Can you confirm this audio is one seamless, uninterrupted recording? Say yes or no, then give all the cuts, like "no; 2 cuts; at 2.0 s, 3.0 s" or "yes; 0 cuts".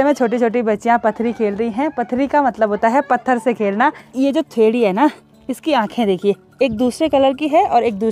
no; 1 cut; at 4.1 s